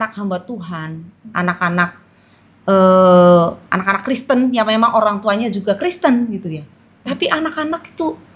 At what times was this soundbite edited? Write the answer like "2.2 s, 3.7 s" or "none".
none